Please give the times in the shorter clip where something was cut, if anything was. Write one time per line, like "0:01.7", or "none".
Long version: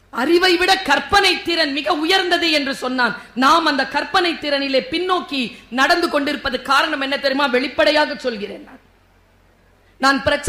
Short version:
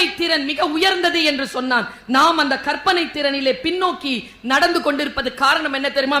none